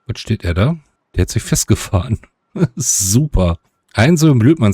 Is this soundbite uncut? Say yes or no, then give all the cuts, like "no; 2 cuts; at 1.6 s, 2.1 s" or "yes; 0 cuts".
no; 1 cut; at 1.0 s